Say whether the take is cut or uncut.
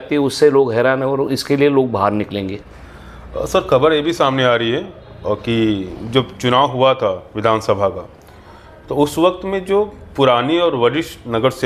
uncut